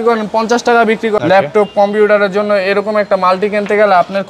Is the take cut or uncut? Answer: cut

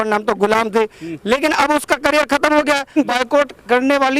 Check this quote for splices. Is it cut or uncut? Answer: cut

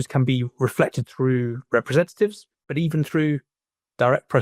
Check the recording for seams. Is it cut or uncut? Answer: cut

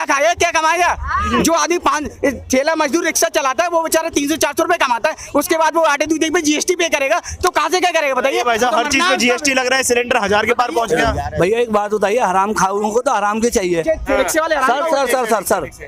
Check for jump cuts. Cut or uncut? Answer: uncut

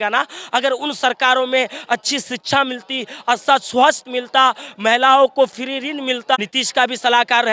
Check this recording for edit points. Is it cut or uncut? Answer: cut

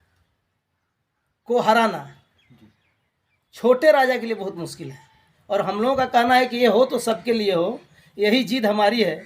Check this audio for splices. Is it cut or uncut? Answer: cut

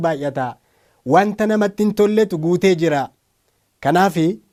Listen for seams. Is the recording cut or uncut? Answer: uncut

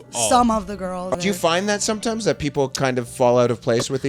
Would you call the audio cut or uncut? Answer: cut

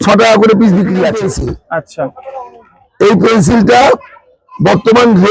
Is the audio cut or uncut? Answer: cut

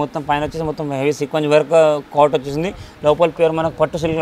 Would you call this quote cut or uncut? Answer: uncut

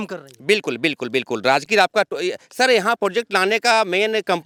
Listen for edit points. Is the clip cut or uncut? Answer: uncut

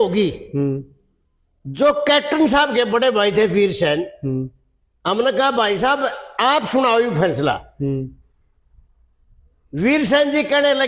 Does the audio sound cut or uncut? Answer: uncut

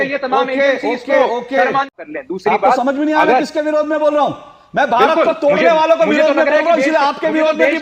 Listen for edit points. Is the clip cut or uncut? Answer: cut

